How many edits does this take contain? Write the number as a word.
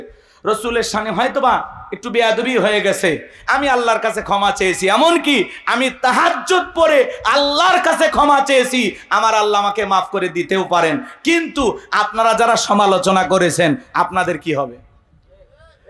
zero